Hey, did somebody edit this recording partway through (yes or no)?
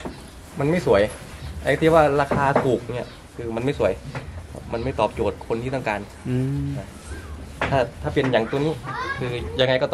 no